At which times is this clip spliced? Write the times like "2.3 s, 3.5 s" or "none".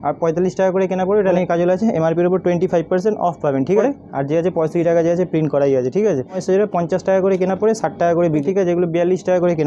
1.3 s, 3.8 s, 6.4 s, 8.4 s